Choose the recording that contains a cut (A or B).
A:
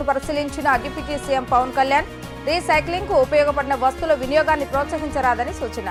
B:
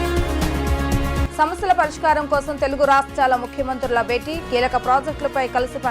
B